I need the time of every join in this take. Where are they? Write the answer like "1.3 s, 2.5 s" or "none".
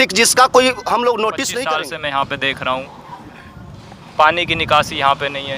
1.5 s